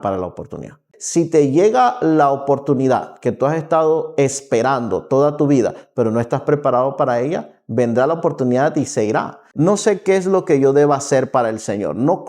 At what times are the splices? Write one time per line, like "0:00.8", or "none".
0:01.0
0:09.4